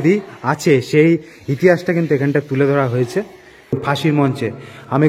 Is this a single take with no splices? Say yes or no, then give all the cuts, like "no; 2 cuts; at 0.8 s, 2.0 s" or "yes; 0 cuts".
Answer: no; 1 cut; at 3.7 s